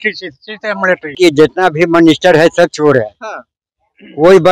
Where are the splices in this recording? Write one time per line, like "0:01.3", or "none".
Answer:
0:01.2